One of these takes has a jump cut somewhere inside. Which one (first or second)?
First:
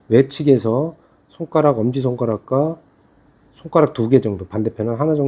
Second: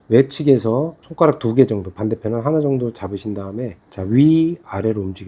second